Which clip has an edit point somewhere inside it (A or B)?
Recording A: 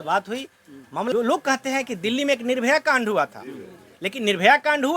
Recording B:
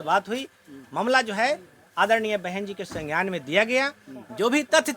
A